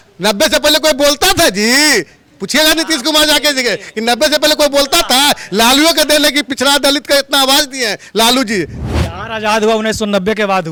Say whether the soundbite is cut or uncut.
uncut